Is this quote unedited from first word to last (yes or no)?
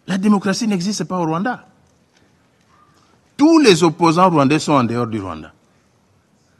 yes